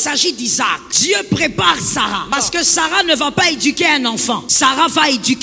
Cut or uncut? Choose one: cut